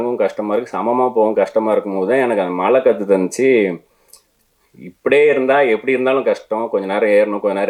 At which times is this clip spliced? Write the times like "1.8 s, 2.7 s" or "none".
none

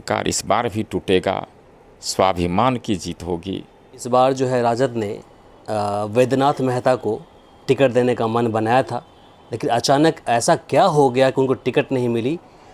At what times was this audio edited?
4.0 s

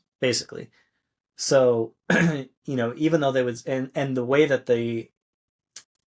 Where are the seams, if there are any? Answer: none

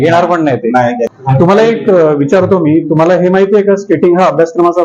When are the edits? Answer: 1.1 s

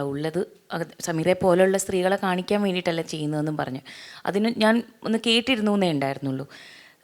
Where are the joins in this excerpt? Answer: none

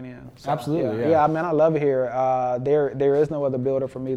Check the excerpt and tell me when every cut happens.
none

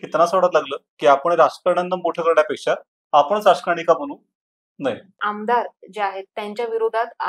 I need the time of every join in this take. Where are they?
5.2 s

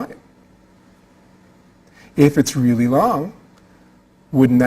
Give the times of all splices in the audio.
1.9 s

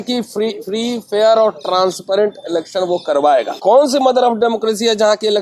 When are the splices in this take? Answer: 3.6 s

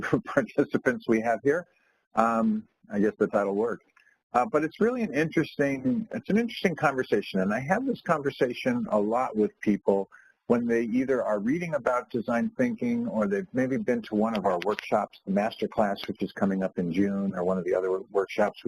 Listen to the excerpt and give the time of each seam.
14.8 s

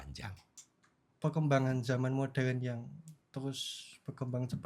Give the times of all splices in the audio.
1.0 s

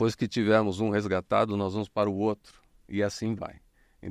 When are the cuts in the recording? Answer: none

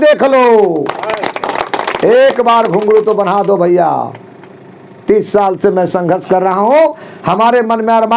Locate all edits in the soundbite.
none

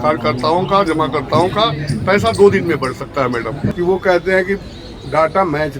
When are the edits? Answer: 3.6 s

